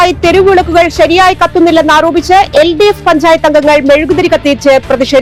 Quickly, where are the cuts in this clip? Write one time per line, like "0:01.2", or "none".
none